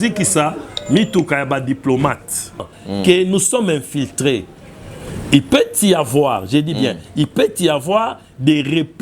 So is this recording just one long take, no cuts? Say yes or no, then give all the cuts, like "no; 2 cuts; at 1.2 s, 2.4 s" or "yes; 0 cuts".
no; 1 cut; at 2.8 s